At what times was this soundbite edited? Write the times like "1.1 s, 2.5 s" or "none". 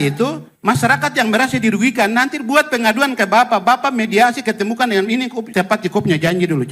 5.4 s